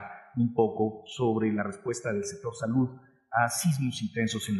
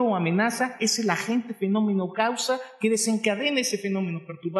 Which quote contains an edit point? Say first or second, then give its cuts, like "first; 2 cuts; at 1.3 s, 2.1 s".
second; 1 cut; at 3.5 s